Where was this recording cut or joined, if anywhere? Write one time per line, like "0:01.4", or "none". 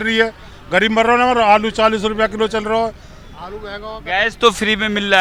none